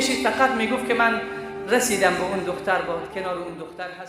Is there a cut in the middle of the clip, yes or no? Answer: no